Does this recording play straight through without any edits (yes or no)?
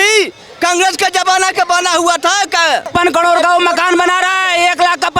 no